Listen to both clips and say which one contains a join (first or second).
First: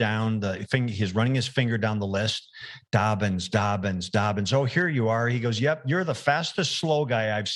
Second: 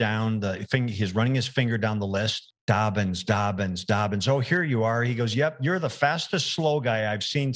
second